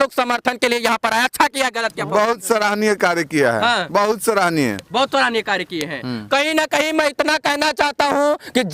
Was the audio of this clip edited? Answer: no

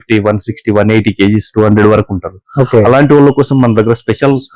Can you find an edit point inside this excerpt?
no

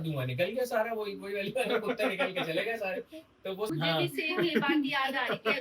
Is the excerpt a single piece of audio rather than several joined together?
no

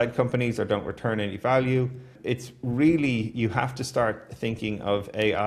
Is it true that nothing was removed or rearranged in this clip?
no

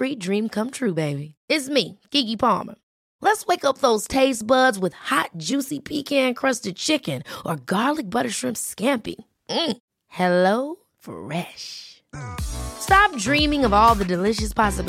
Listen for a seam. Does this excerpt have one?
no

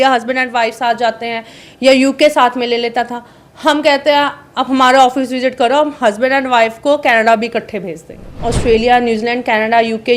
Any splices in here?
yes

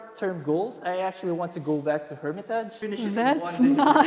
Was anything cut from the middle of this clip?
yes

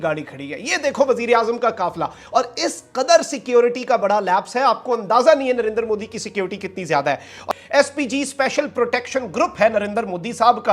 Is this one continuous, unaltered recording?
yes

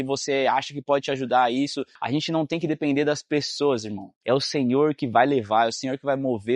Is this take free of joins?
no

